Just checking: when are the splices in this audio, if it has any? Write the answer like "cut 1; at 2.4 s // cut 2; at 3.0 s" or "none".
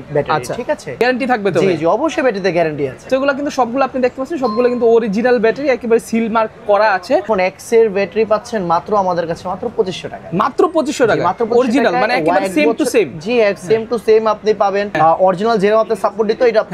cut 1; at 1.0 s // cut 2; at 3.1 s // cut 3; at 7.2 s // cut 4; at 14.9 s